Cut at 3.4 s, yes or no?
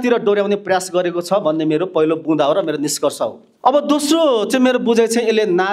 yes